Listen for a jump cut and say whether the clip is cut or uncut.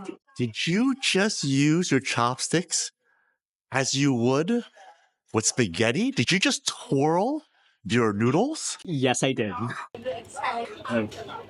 uncut